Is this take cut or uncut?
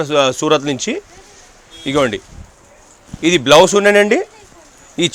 uncut